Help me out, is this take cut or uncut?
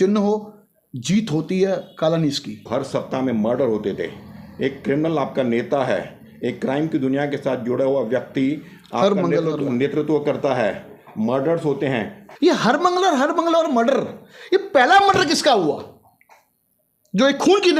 cut